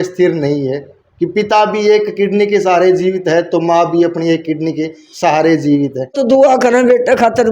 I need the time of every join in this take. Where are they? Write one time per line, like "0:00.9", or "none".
0:06.0